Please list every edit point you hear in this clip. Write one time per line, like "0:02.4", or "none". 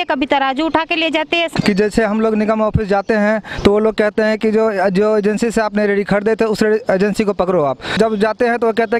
0:01.5
0:07.9